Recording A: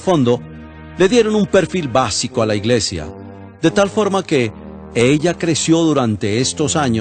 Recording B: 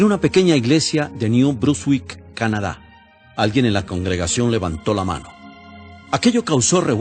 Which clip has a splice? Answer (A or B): B